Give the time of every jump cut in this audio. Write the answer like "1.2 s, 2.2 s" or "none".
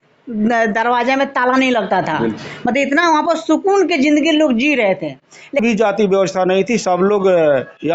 5.6 s

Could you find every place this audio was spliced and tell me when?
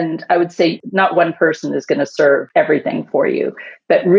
0.8 s, 2.5 s

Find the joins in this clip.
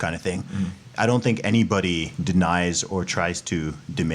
2.1 s

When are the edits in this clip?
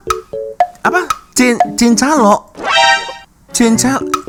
none

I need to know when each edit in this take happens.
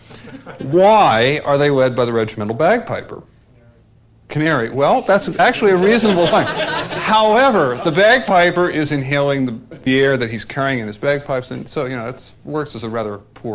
1.9 s

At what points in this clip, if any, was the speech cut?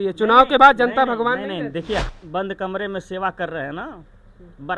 2.1 s

